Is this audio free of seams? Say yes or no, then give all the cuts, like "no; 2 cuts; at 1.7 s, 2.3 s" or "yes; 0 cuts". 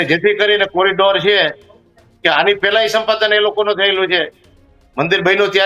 yes; 0 cuts